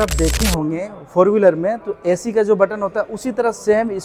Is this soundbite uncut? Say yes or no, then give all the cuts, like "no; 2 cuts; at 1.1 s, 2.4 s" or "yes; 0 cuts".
yes; 0 cuts